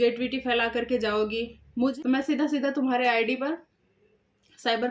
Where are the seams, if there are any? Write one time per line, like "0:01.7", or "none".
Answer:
0:01.9